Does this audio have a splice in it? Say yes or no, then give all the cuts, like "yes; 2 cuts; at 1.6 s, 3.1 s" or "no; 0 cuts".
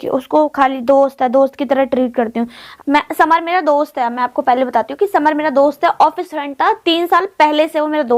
yes; 1 cut; at 2.6 s